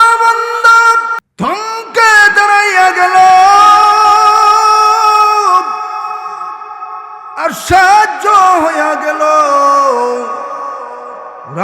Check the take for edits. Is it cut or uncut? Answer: cut